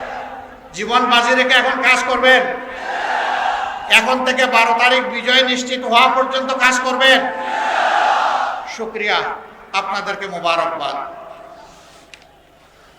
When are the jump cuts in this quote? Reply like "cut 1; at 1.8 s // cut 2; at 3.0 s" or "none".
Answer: none